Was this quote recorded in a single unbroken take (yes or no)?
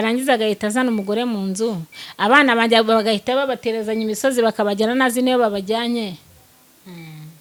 yes